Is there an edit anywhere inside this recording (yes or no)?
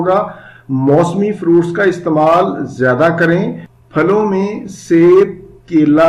no